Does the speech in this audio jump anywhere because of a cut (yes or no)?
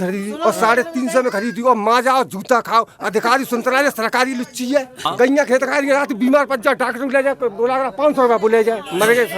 yes